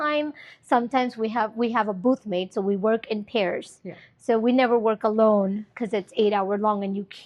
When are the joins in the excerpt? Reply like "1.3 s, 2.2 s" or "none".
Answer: none